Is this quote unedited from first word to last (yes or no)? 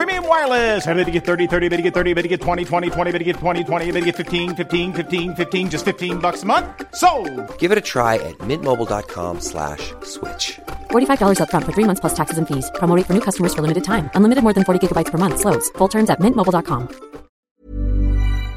no